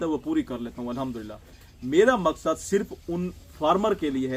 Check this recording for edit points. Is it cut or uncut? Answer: uncut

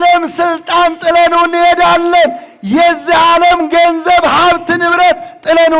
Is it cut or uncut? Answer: uncut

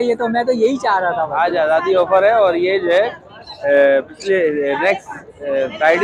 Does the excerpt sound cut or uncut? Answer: uncut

